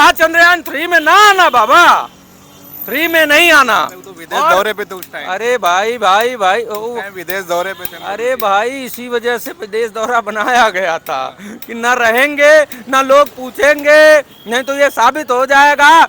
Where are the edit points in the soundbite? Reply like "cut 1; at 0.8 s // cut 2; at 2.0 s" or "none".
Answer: none